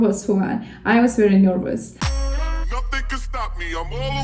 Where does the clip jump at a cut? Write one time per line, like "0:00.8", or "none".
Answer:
none